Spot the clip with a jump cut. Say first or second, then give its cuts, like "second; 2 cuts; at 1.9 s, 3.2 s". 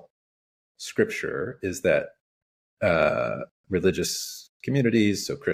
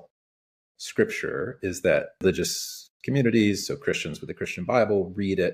second; 1 cut; at 2.2 s